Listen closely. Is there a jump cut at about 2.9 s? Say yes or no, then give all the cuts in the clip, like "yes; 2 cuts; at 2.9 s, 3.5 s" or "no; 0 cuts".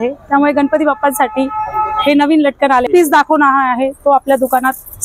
yes; 1 cut; at 2.9 s